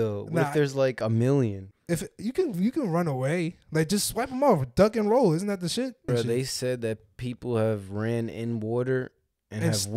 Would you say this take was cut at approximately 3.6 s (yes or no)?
no